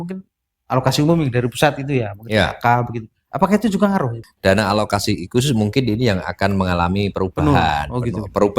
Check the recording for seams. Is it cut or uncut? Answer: cut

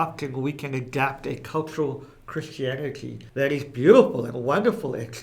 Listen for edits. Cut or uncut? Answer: cut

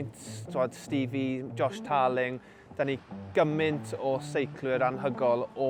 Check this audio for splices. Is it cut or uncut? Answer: uncut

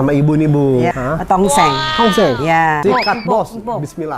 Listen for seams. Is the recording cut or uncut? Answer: cut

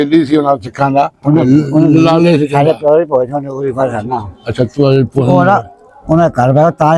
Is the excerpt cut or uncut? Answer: uncut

